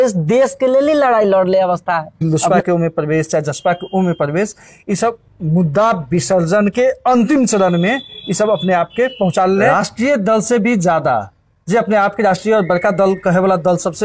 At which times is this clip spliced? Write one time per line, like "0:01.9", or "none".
0:02.2
0:09.6

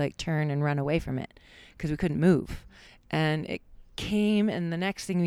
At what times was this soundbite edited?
0:02.5

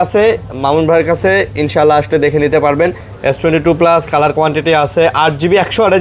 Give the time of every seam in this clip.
0:03.0

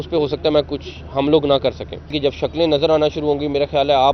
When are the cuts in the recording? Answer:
0:02.1

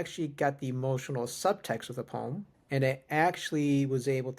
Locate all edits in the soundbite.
0:02.5

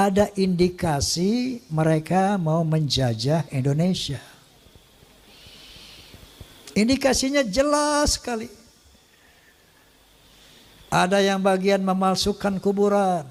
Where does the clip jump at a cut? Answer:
none

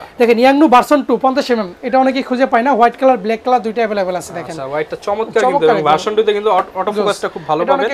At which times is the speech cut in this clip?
none

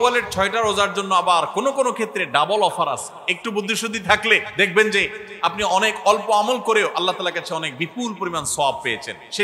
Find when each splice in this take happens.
0:04.5

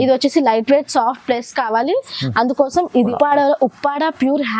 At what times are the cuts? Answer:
0:03.1

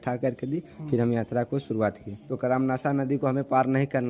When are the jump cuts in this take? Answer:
0:02.2

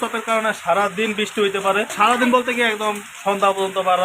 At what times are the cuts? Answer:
0:01.9

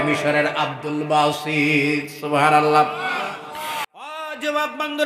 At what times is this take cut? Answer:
0:04.1

